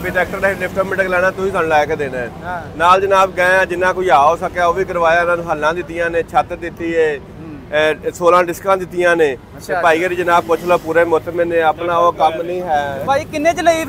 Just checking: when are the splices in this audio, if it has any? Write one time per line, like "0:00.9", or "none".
none